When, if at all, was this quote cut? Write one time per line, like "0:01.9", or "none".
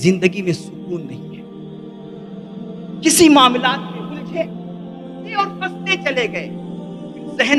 0:01.1
0:02.8